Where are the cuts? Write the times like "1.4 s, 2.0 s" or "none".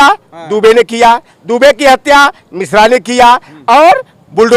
none